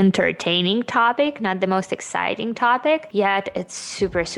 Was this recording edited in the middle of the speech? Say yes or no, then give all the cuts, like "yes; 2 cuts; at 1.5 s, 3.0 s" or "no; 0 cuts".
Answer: no; 0 cuts